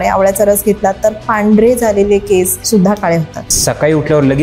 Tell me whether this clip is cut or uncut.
cut